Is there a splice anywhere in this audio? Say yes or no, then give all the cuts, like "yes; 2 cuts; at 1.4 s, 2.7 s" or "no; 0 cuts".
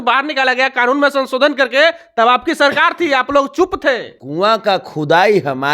yes; 1 cut; at 4.2 s